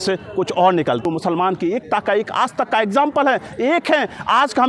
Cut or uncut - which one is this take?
cut